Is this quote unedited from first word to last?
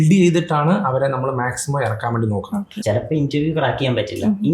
no; 1 cut; at 2.7 s

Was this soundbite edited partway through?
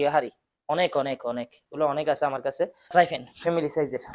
yes; 1 cut; at 2.9 s

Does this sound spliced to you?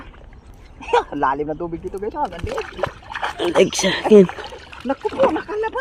no; 0 cuts

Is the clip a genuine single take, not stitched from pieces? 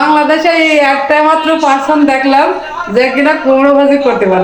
yes; 0 cuts

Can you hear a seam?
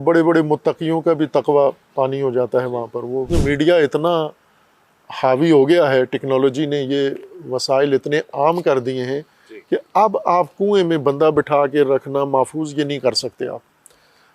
yes; 1 cut; at 3.3 s

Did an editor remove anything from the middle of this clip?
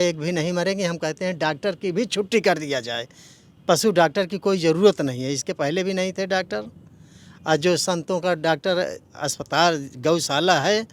no; 0 cuts

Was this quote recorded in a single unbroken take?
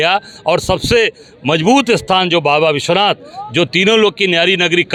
yes; 0 cuts

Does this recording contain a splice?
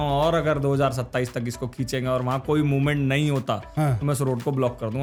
no; 0 cuts

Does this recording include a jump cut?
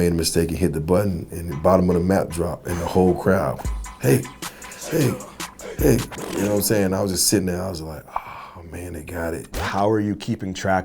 yes; 1 cut; at 9.6 s

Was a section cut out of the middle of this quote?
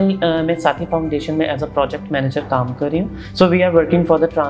yes; 1 cut; at 3.2 s

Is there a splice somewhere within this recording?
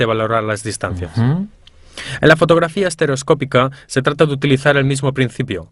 yes; 1 cut; at 3.2 s

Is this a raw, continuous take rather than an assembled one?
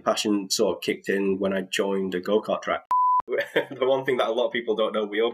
no; 1 cut; at 3.1 s

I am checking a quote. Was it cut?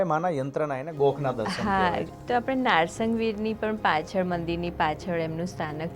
yes; 1 cut; at 2.1 s

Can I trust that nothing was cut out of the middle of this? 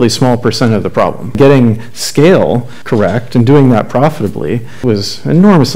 no; 3 cuts; at 1.4 s, 2.7 s, 4.8 s

